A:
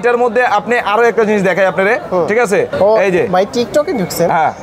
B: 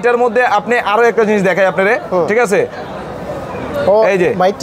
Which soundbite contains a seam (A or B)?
A